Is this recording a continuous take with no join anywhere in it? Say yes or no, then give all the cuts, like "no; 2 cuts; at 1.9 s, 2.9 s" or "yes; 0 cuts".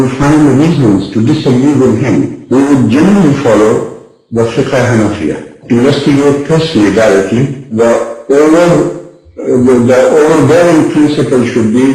yes; 0 cuts